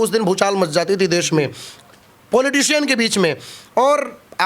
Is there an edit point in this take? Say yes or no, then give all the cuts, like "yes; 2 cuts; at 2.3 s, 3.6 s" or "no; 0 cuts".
no; 0 cuts